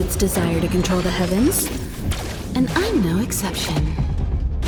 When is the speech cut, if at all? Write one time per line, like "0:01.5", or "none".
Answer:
none